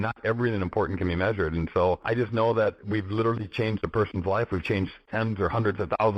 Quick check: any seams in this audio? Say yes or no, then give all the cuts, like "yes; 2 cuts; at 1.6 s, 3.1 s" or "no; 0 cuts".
yes; 3 cuts; at 2.0 s, 2.8 s, 5.0 s